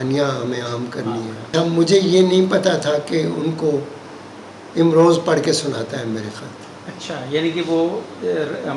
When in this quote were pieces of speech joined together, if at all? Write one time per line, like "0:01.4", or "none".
0:01.5